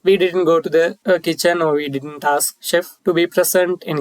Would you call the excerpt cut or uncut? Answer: cut